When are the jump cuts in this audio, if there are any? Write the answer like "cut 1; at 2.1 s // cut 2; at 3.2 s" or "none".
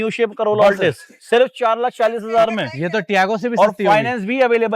none

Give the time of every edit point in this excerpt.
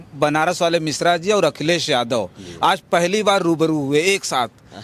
none

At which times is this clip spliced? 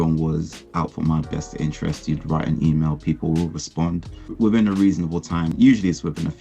cut 1; at 4.3 s // cut 2; at 5.5 s

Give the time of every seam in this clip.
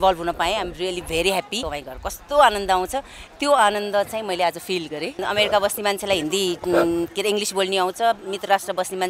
cut 1; at 1.7 s // cut 2; at 5.2 s

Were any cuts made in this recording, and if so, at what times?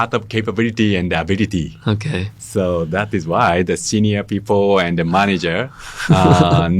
none

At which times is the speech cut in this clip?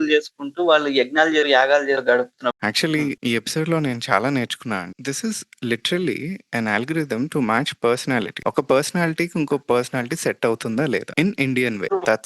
cut 1; at 2.6 s // cut 2; at 4.9 s

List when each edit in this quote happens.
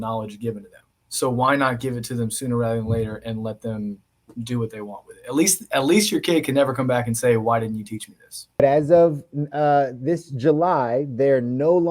cut 1; at 8.6 s

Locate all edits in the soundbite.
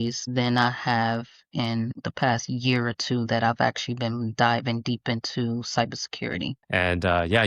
cut 1; at 6.6 s

